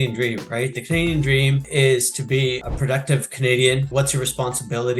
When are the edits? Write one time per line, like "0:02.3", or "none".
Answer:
0:01.7
0:02.7
0:03.9